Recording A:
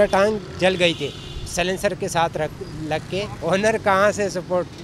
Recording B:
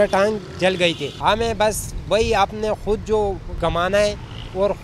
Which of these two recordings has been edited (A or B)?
B